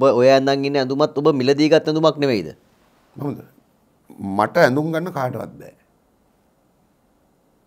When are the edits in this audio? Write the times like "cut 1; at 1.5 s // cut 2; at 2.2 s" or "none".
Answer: cut 1; at 6.5 s